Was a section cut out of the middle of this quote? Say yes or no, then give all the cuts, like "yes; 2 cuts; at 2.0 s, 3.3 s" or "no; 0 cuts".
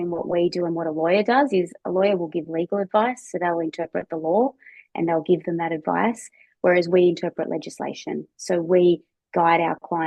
no; 0 cuts